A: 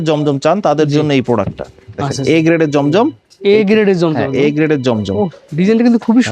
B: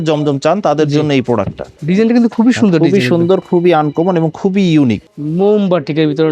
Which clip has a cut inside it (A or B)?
B